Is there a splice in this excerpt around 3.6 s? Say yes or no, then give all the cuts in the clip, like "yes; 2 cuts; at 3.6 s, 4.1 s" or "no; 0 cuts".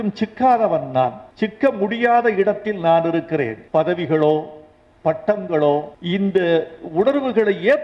yes; 3 cuts; at 1.2 s, 3.6 s, 5.9 s